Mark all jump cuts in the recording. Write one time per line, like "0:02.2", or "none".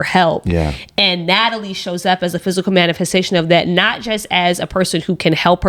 none